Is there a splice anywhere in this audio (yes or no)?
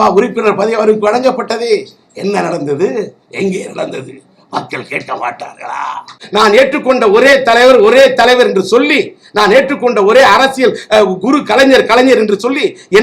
yes